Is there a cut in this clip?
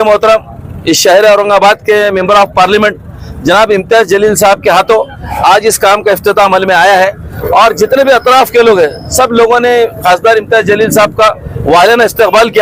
no; 0 cuts

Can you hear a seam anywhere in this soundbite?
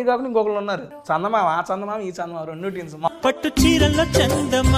yes; 2 cuts; at 0.9 s, 3.1 s

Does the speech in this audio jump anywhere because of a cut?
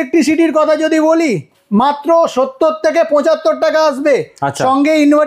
no; 0 cuts

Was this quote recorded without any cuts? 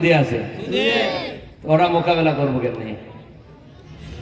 yes; 0 cuts

